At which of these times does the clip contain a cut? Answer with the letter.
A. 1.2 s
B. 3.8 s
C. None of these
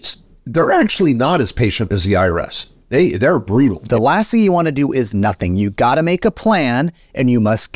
B